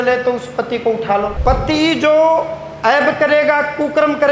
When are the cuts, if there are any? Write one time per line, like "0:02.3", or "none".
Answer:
0:01.3